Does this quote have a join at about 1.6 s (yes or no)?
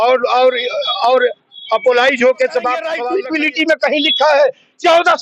no